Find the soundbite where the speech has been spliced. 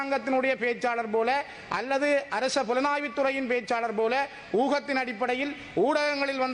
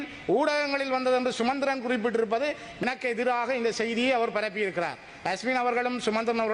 second; 1 cut; at 2.8 s

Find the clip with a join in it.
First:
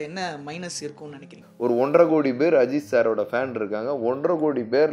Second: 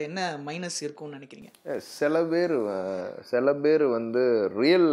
first; 1 cut; at 1.5 s

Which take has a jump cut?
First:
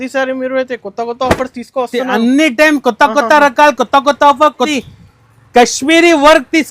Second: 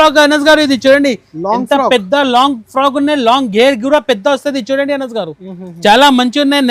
first; 1 cut; at 4.7 s

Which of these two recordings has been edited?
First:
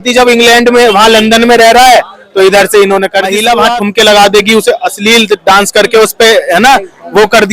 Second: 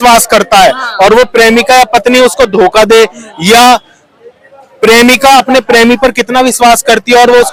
first; 1 cut; at 3.3 s

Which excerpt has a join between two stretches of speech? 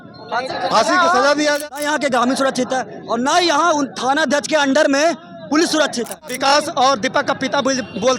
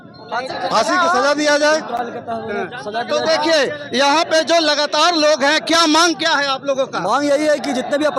first; 2 cuts; at 1.6 s, 6.3 s

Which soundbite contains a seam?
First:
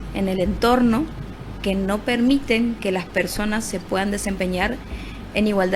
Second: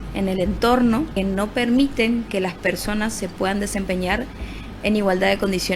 second; 1 cut; at 1.1 s

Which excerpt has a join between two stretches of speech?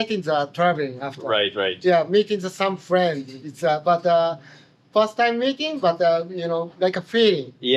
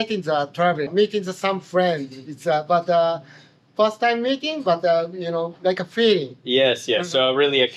second; 1 cut; at 0.9 s

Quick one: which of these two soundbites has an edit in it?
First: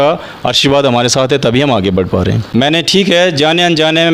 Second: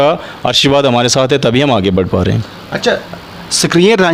first; 1 cut; at 2.4 s

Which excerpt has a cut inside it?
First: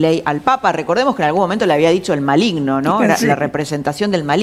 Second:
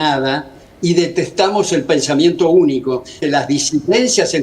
second; 1 cut; at 3.2 s

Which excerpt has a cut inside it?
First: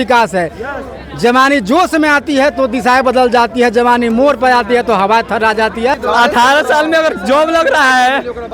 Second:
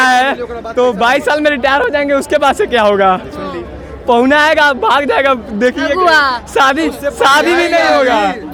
first; 1 cut; at 5.9 s

